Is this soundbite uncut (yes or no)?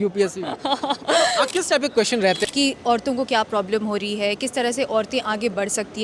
no